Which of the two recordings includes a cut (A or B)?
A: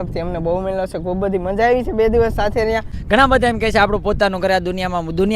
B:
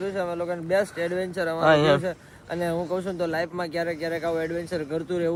A